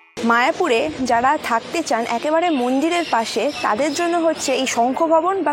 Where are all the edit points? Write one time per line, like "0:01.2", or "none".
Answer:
none